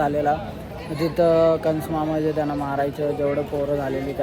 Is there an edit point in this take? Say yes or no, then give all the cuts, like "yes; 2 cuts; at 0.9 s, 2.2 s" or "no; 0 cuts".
no; 0 cuts